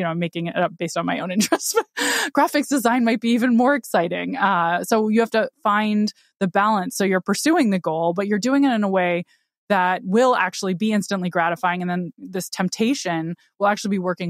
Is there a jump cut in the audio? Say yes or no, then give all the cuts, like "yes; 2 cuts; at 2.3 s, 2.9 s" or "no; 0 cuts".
yes; 1 cut; at 12.2 s